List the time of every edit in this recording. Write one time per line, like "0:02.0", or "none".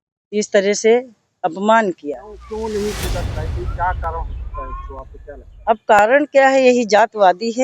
0:02.4